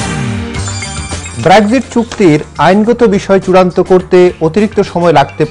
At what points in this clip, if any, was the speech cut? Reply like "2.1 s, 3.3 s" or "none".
1.3 s